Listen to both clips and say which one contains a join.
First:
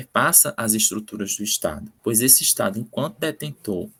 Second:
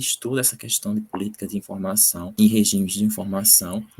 second; 1 cut; at 2.3 s

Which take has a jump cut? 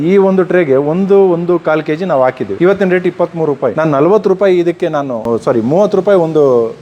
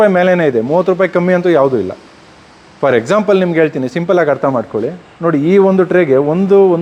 first; 3 cuts; at 2.5 s, 3.7 s, 5.2 s

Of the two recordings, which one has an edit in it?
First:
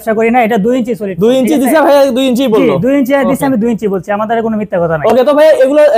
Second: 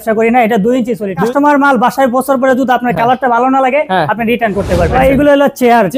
second; 2 cuts; at 1.2 s, 4.9 s

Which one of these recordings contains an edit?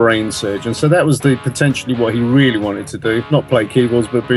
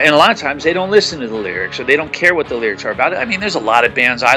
first; 1 cut; at 3.2 s

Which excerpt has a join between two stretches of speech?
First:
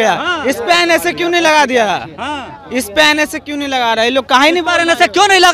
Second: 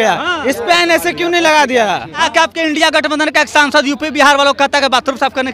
second; 1 cut; at 2.3 s

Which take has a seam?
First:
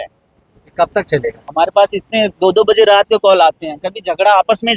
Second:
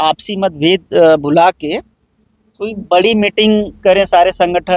first; 1 cut; at 1.4 s

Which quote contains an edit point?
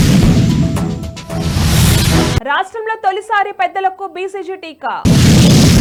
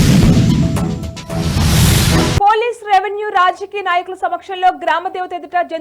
second; 1 cut; at 2.4 s

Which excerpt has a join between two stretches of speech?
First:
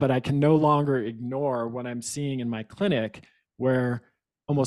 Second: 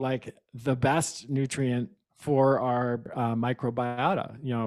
second; 1 cut; at 3.1 s

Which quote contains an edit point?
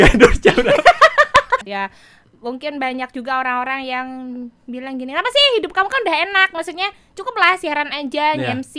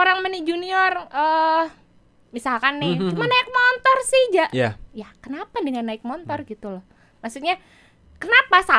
first; 1 cut; at 1.6 s

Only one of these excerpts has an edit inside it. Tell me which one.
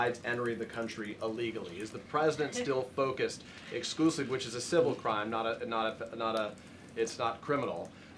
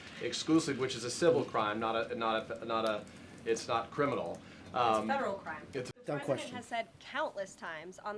second; 1 cut; at 5.9 s

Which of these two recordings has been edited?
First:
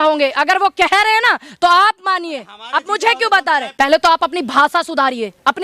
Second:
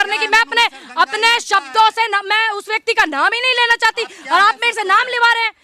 first; 1 cut; at 3.7 s

